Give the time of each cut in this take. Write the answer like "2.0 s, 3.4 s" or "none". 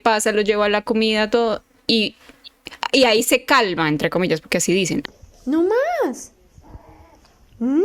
5.1 s